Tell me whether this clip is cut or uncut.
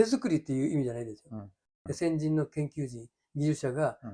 cut